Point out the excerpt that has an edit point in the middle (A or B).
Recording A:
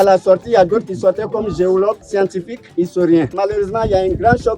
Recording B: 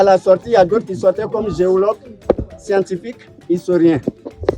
A